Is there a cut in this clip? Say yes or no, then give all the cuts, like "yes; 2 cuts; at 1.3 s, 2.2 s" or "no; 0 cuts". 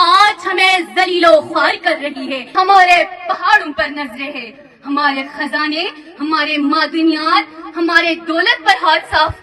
yes; 1 cut; at 2.4 s